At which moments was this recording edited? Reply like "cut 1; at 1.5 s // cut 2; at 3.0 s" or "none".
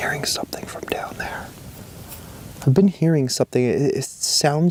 none